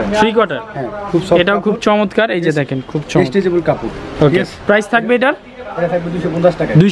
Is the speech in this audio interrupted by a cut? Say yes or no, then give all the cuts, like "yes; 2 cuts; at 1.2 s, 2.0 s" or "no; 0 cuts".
no; 0 cuts